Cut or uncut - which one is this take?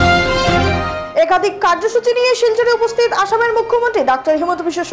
cut